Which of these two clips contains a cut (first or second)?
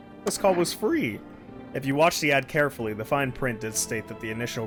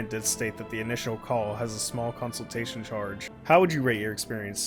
second